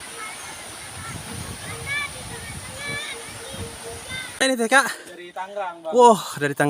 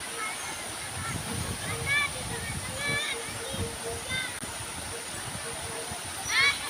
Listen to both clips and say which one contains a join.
first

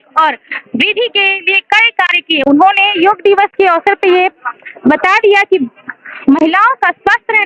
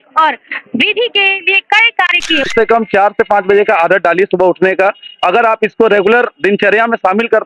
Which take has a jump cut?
second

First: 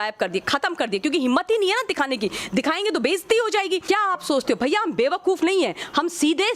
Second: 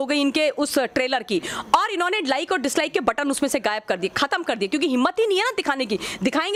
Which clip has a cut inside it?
first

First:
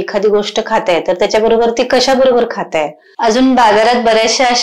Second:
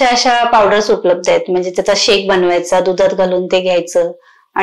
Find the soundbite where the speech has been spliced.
first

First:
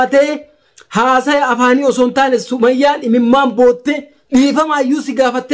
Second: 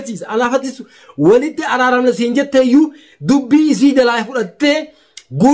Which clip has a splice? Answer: first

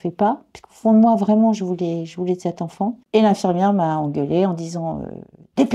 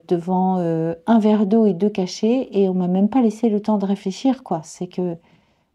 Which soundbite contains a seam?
first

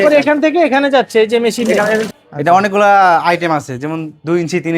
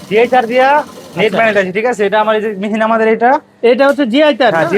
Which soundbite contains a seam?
first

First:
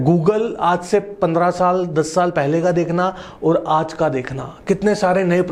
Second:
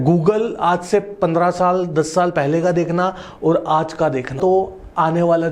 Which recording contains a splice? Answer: second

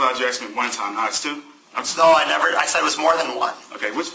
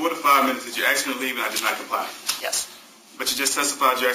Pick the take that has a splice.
second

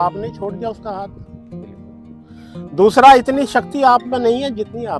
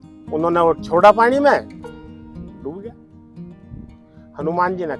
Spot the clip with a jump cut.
first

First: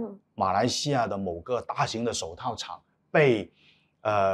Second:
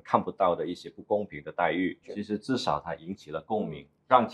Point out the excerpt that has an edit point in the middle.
second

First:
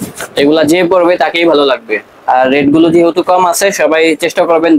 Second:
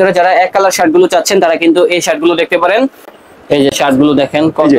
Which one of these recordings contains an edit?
second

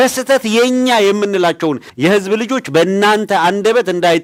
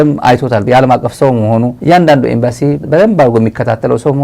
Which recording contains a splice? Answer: second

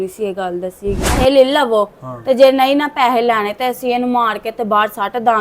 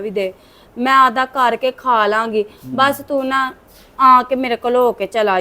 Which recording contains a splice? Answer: first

